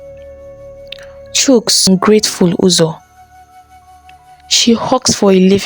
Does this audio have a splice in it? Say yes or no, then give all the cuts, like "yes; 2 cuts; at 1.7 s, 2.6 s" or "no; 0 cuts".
yes; 1 cut; at 1.9 s